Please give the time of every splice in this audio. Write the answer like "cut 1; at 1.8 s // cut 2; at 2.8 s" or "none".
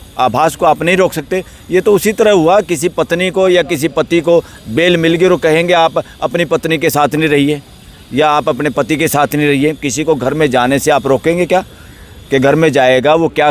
none